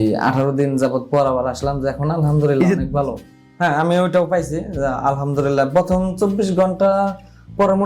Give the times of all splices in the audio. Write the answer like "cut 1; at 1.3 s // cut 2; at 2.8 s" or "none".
cut 1; at 3.2 s